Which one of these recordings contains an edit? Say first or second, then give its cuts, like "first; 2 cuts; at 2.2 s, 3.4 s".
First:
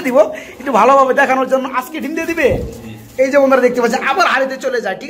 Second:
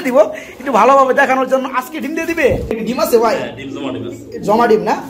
second; 1 cut; at 2.8 s